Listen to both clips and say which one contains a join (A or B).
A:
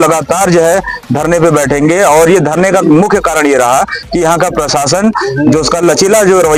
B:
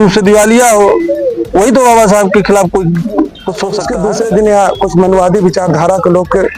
B